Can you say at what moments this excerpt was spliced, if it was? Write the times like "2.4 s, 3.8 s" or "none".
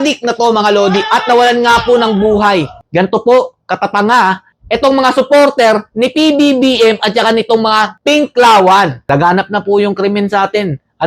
2.8 s, 9.0 s